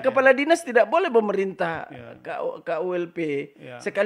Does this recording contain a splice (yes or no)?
no